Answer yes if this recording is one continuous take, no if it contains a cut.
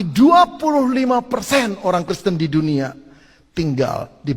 yes